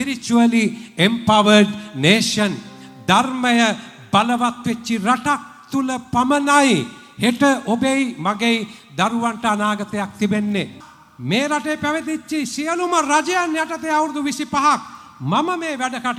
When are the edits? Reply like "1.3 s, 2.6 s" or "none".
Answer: 10.8 s